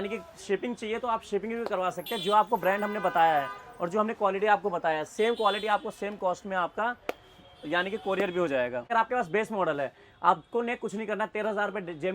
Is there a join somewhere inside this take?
yes; 1 cut; at 8.9 s

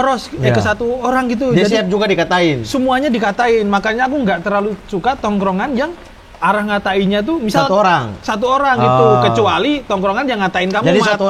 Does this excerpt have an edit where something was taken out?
no; 0 cuts

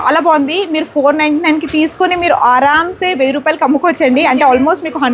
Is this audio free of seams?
yes; 0 cuts

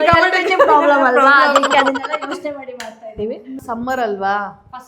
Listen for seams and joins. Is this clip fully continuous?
no; 1 cut; at 3.5 s

